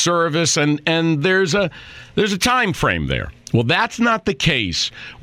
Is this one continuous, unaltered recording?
yes; 0 cuts

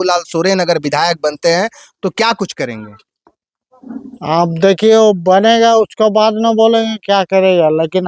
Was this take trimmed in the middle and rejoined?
no; 0 cuts

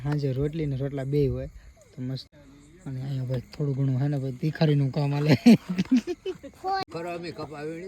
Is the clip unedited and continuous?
no; 2 cuts; at 2.3 s, 6.8 s

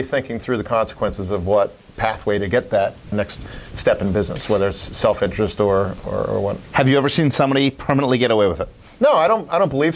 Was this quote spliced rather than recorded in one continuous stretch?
no; 0 cuts

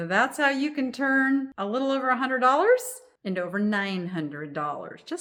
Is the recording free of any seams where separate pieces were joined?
yes; 0 cuts

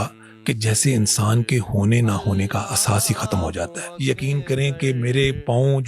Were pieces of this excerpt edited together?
yes; 1 cut; at 3.8 s

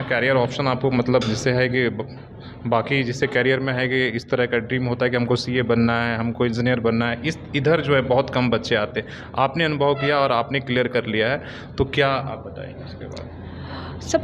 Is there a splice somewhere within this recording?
no; 0 cuts

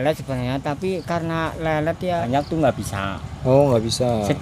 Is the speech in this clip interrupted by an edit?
yes; 1 cut; at 2.3 s

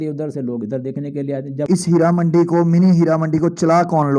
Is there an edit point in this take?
yes; 1 cut; at 1.0 s

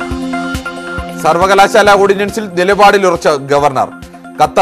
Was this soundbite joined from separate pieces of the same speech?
no; 0 cuts

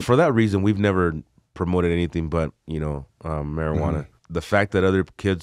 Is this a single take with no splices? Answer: no; 1 cut; at 4.2 s

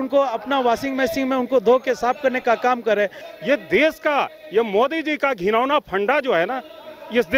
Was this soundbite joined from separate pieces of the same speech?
yes; 1 cut; at 3.2 s

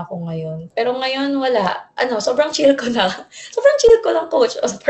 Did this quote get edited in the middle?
no; 0 cuts

